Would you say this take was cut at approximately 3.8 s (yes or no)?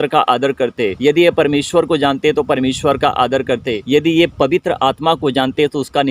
yes